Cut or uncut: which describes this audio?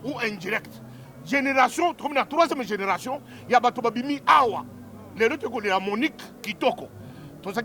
uncut